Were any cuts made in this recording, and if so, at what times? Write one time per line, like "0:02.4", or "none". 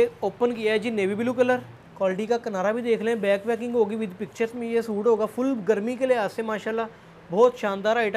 0:01.8